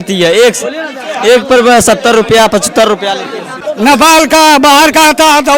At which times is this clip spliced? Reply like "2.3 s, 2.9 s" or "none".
3.5 s